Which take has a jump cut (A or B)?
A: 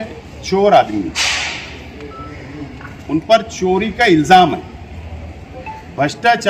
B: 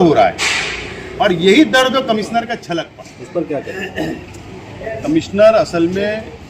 B